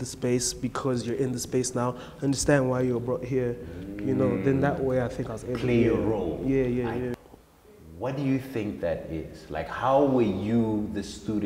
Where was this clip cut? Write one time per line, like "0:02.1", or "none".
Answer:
0:07.1

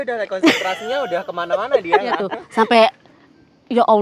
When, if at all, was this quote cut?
0:02.7

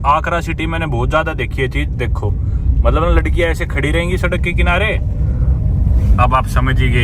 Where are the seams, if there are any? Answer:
none

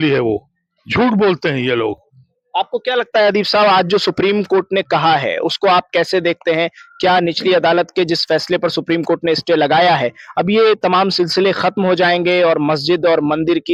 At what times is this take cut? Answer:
none

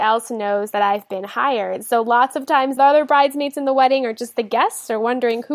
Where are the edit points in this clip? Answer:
0:02.8

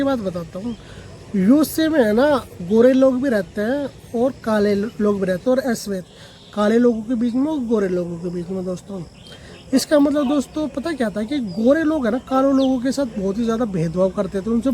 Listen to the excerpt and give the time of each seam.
0:05.4

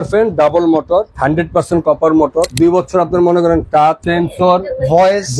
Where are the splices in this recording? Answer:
0:01.1
0:02.5
0:04.0

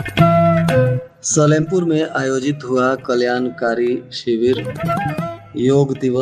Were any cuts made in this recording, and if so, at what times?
0:01.1

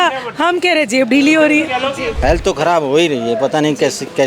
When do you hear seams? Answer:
0:02.1

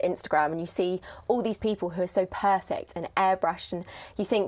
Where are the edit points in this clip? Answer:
none

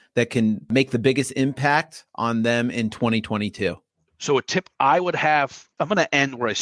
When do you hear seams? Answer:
0:03.8
0:05.6

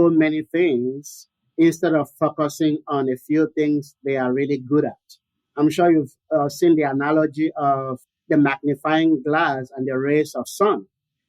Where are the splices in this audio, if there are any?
0:08.1

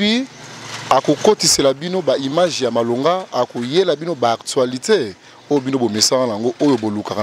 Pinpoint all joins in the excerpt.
none

